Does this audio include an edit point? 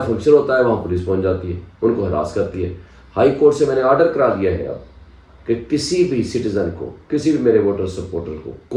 no; 0 cuts

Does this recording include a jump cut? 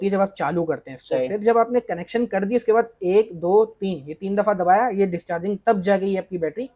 no; 0 cuts

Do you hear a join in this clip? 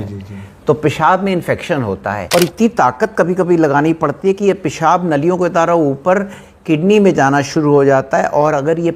yes; 1 cut; at 2.2 s

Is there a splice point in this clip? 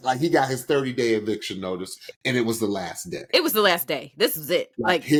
no; 0 cuts

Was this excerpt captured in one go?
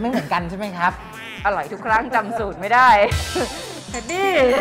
yes; 0 cuts

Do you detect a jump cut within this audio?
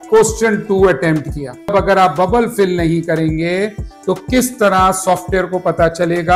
no; 0 cuts

